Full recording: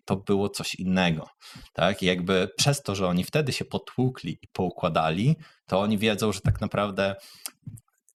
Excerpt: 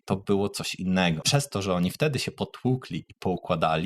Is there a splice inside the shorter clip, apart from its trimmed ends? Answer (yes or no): yes